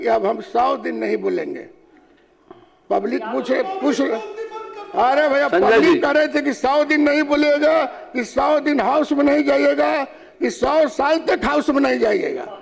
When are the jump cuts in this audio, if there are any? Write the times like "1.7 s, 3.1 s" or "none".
none